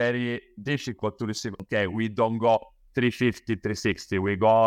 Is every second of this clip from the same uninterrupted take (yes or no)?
no